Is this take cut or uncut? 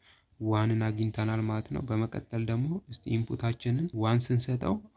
uncut